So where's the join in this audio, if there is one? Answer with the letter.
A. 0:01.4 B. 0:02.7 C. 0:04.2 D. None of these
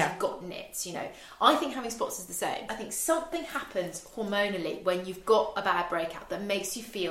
B